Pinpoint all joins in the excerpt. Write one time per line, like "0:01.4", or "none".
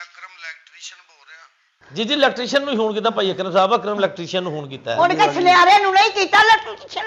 none